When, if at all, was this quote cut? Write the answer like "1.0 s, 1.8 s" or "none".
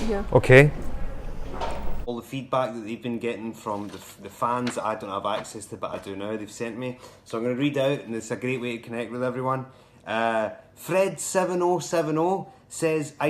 2.1 s